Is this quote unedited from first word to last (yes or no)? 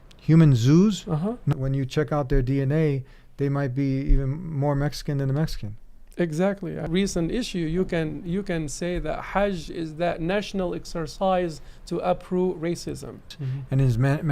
no